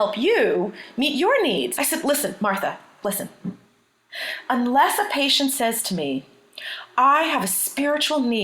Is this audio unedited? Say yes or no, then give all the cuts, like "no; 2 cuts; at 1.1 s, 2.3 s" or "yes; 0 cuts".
no; 1 cut; at 1.8 s